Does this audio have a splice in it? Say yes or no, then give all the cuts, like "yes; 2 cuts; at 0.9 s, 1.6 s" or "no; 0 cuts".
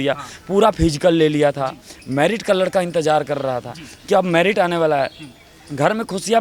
no; 0 cuts